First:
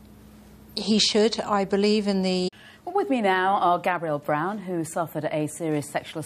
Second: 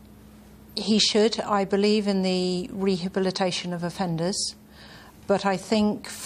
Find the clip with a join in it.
second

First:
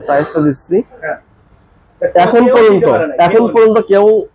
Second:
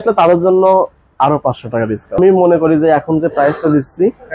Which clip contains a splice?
second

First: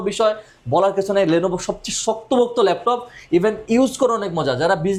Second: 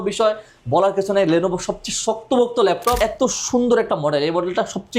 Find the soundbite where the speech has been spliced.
second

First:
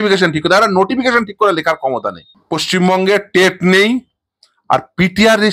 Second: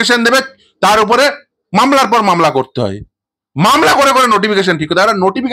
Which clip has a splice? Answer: first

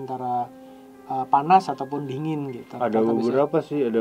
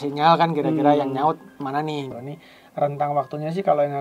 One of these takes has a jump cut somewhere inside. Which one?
second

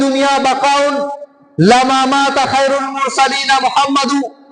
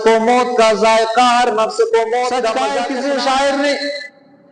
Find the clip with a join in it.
second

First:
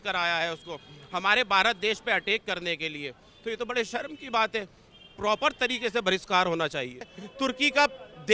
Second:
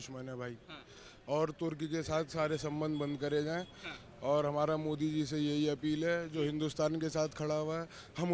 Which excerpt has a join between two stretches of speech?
first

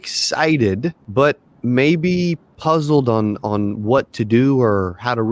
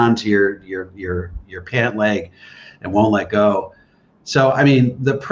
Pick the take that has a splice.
first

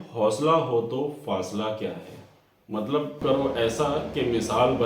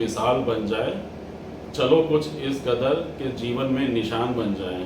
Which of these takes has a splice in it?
first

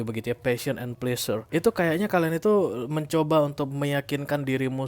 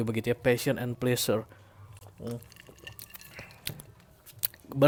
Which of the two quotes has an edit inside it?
first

